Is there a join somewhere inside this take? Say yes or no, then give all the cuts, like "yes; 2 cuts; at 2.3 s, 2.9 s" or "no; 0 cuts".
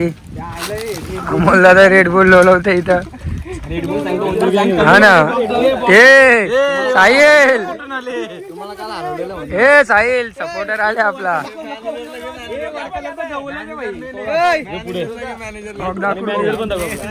no; 0 cuts